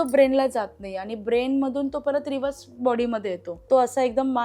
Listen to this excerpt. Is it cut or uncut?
cut